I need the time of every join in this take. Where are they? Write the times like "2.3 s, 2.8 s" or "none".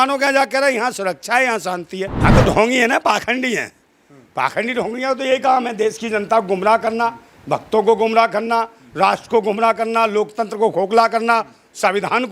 2.1 s